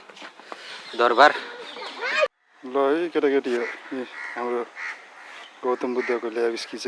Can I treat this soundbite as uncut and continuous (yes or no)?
no